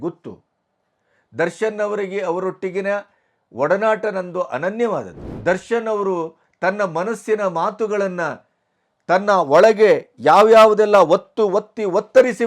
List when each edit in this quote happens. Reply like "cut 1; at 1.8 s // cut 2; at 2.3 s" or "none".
cut 1; at 5.2 s